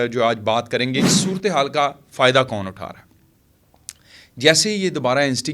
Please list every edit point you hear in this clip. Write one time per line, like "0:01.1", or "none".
0:01.1